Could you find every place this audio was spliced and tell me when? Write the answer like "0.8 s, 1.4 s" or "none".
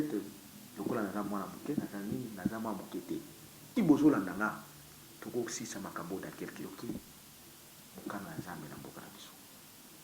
3.7 s, 6.7 s